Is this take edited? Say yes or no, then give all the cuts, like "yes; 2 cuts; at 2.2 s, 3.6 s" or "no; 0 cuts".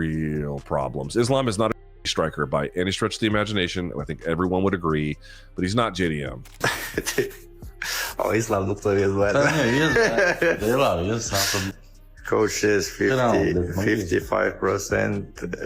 yes; 1 cut; at 6.5 s